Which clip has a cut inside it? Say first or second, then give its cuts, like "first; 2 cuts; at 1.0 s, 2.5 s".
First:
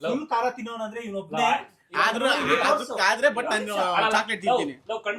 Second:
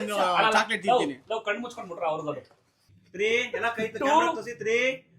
second; 1 cut; at 2.8 s